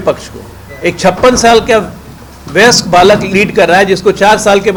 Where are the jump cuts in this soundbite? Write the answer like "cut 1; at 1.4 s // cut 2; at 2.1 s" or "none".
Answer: none